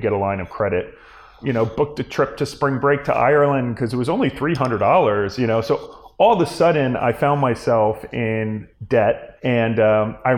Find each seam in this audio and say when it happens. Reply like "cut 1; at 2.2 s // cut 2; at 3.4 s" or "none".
none